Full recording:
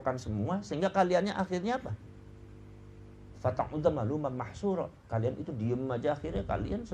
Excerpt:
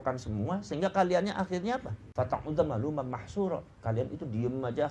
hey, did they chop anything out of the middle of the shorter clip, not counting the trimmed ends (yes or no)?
yes